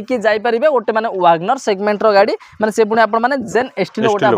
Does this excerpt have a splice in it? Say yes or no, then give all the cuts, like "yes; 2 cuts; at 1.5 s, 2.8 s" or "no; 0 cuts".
no; 0 cuts